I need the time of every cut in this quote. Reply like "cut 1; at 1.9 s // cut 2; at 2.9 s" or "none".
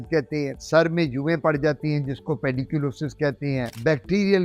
none